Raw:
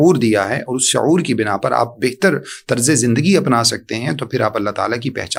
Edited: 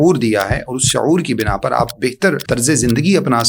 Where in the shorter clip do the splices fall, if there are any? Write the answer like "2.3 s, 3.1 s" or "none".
2.4 s